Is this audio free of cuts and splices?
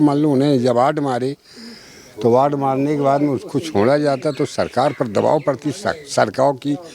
yes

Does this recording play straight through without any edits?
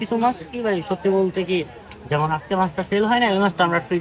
yes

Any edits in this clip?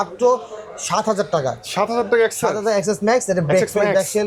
no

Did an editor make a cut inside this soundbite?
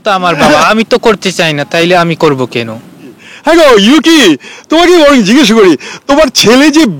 yes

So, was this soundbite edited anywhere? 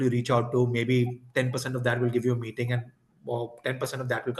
no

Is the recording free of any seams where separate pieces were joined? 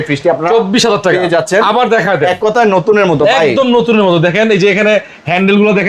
yes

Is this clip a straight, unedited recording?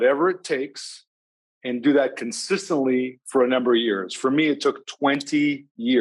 yes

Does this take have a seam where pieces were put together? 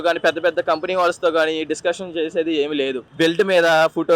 yes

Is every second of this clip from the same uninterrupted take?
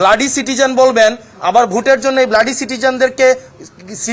yes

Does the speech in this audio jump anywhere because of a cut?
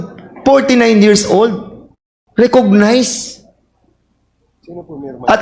no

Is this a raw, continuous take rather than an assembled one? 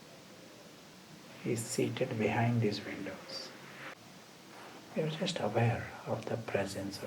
no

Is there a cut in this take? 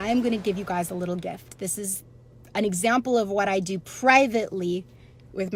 no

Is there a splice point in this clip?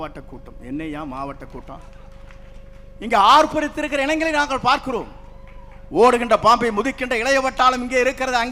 no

